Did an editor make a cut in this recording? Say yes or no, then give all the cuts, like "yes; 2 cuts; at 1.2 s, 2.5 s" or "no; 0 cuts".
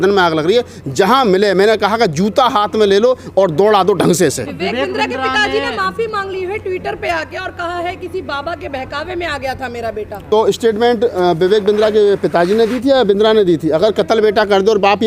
no; 0 cuts